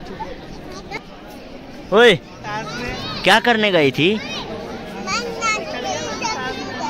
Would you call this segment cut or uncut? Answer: cut